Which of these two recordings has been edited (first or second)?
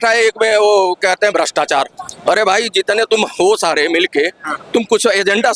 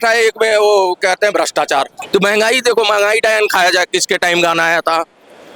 second